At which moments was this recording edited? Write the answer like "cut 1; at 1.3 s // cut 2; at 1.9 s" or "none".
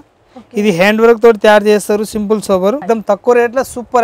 cut 1; at 2.8 s